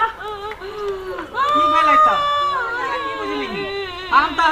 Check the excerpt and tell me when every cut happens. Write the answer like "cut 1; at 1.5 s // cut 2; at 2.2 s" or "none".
cut 1; at 3.1 s